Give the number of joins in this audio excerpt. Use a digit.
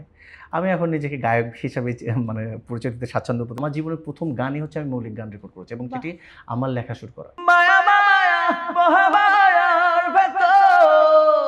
2